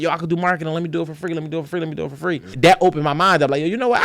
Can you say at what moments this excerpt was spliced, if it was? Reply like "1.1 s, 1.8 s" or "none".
2.5 s